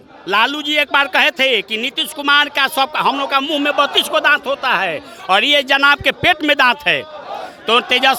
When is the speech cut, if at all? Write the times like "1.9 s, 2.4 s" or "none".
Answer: none